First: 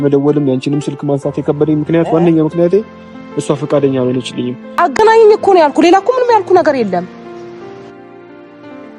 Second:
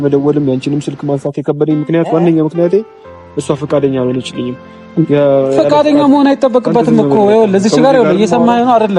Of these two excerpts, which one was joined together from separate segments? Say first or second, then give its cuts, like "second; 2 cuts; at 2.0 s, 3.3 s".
first; 1 cut; at 4.7 s